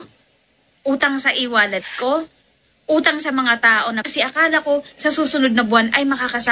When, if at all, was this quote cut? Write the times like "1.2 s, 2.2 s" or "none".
none